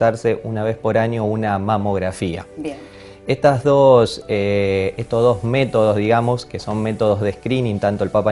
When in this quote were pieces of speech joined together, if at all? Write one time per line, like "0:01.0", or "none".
none

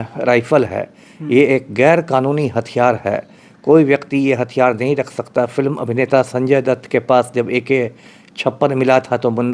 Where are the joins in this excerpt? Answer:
none

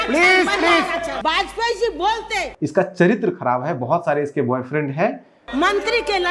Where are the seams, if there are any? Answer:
0:01.1
0:02.5
0:05.4

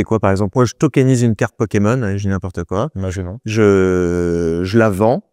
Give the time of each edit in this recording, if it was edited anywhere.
none

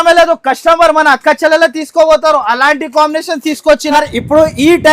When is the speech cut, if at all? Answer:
0:03.9

